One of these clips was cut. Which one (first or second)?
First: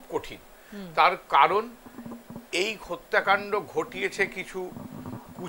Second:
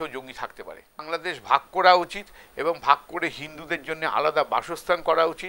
second